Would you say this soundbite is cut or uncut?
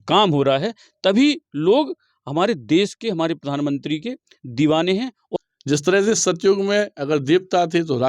cut